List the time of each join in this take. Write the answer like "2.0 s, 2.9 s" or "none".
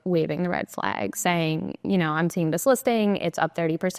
none